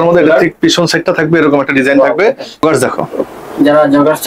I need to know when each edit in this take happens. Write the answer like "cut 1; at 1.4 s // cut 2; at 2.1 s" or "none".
cut 1; at 2.6 s